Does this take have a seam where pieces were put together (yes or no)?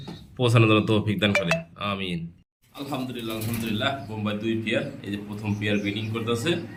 no